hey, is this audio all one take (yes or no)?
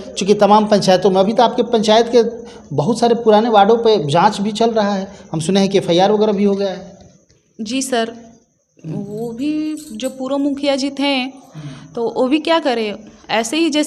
yes